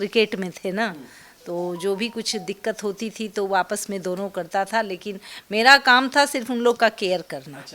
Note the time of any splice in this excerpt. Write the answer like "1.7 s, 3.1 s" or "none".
none